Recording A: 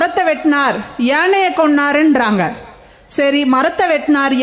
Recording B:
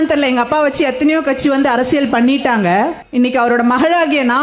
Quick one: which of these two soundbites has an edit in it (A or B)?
B